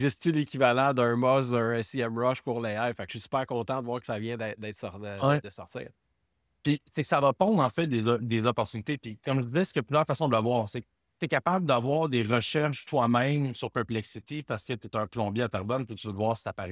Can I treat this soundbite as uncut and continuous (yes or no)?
yes